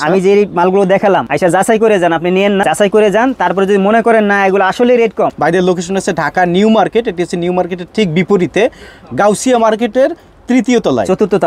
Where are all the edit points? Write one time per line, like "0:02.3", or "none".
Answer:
0:01.3
0:02.6
0:05.3